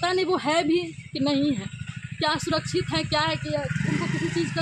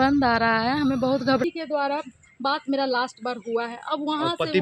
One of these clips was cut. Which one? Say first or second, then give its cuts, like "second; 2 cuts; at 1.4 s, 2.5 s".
second; 1 cut; at 1.4 s